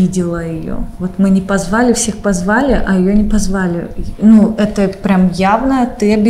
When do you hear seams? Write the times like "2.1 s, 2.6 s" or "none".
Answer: none